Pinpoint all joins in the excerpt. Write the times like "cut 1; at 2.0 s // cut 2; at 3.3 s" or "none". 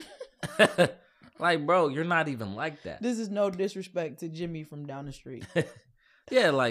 none